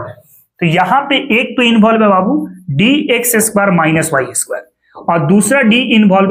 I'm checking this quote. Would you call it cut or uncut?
uncut